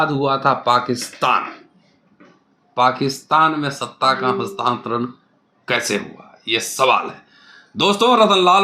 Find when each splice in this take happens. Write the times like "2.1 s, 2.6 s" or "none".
none